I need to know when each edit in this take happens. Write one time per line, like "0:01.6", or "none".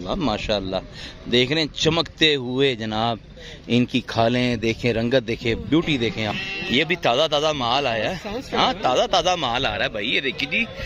0:06.3